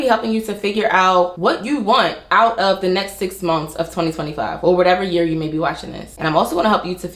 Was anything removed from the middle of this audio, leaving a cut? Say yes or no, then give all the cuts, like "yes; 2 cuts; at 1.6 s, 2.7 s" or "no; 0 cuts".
yes; 1 cut; at 1.3 s